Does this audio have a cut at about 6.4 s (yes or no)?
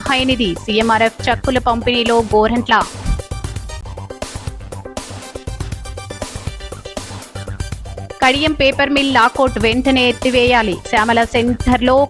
yes